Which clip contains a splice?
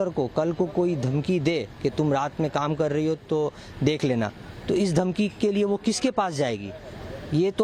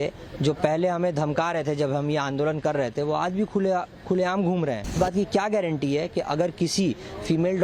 second; 1 cut; at 5.0 s

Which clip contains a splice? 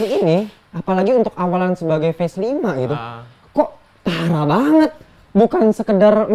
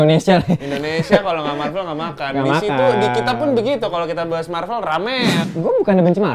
second; 1 cut; at 5.4 s

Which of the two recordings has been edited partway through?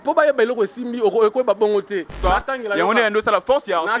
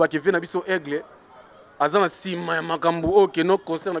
first; 1 cut; at 2.1 s

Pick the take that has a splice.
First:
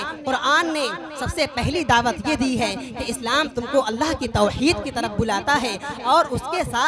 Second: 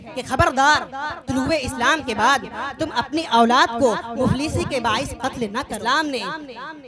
second; 1 cut; at 5.6 s

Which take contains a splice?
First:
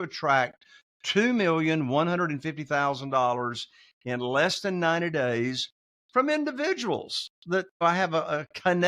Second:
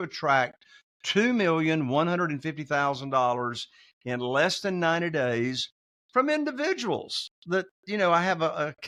first; 1 cut; at 7.8 s

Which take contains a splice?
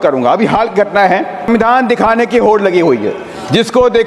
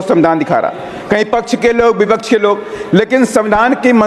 first; 1 cut; at 1.5 s

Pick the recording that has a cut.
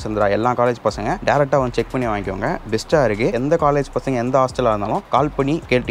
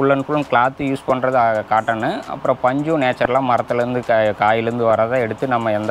first; 3 cuts; at 1.2 s, 3.4 s, 5.0 s

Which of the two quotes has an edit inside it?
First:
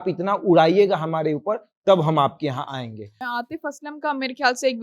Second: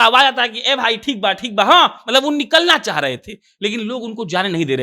first; 1 cut; at 3.2 s

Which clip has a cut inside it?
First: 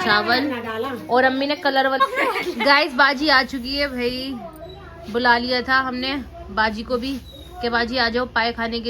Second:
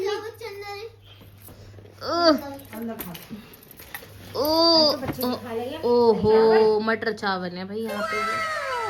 first; 1 cut; at 2.0 s

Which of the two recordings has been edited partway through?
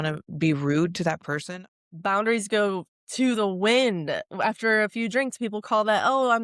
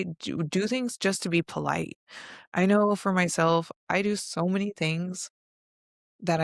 first; 2 cuts; at 1.4 s, 3.0 s

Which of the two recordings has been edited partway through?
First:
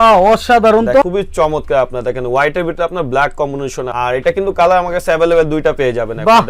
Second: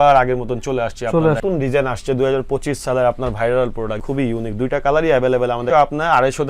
second; 2 cuts; at 1.4 s, 5.6 s

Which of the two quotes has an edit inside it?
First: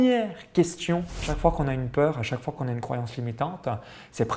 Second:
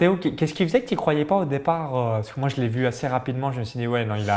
first; 1 cut; at 1.2 s

